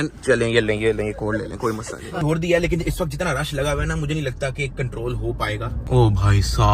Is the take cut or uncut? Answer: cut